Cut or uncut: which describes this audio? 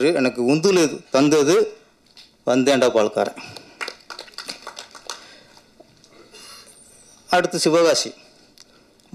uncut